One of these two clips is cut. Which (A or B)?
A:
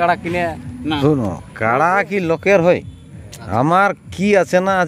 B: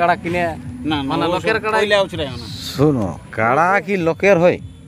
A